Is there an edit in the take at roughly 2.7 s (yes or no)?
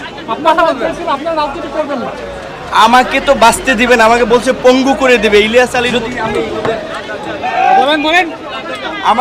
no